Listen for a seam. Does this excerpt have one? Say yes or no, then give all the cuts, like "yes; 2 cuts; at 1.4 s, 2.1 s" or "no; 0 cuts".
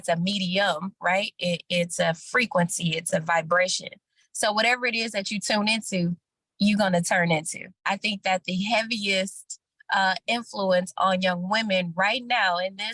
yes; 1 cut; at 7.8 s